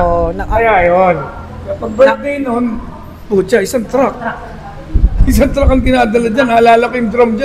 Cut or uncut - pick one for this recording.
uncut